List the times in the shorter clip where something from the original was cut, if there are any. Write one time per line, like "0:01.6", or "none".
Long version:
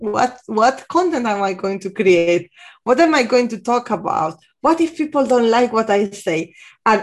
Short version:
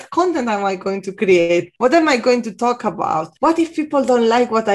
0:01.7
0:03.3

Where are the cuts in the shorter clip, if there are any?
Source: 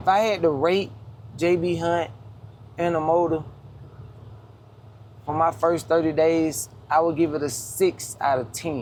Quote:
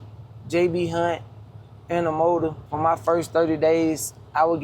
0:02.6

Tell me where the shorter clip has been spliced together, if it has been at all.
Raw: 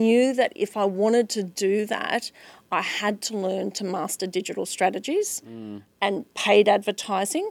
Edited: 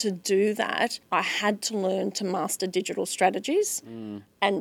0:01.0

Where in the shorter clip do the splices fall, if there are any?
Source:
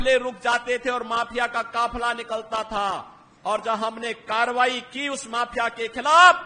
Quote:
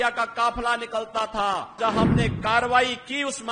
0:01.8

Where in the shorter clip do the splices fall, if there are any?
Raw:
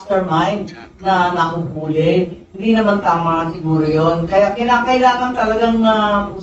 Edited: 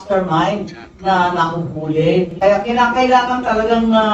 0:02.3

